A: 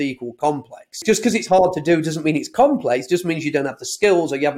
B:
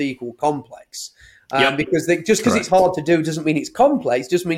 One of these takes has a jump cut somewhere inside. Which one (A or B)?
A